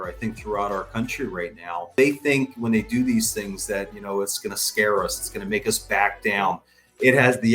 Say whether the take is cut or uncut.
cut